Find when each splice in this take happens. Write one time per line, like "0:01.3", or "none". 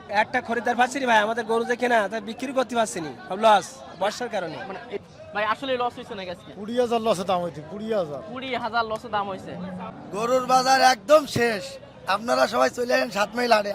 0:04.9
0:09.9